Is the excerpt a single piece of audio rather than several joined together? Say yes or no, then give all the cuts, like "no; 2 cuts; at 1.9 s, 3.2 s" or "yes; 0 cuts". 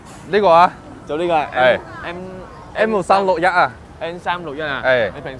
yes; 0 cuts